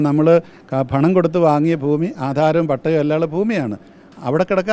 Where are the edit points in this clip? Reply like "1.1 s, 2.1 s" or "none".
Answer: none

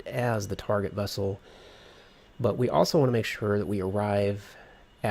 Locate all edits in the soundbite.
none

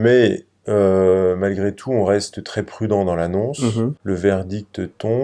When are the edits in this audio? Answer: 4.0 s

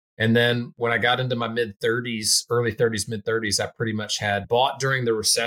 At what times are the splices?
4.4 s

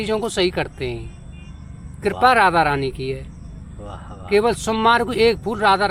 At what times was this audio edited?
none

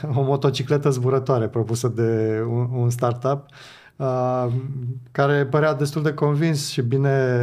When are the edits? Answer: none

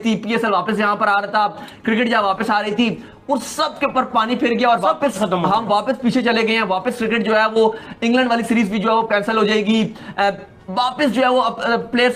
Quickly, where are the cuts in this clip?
none

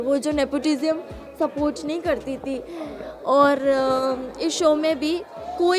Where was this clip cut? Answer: none

